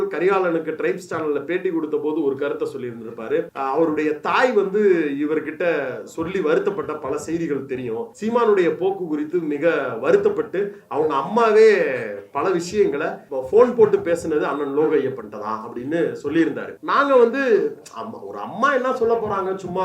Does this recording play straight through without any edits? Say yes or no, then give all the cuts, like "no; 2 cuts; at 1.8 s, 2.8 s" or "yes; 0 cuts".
no; 4 cuts; at 3.5 s, 8.1 s, 13.2 s, 16.7 s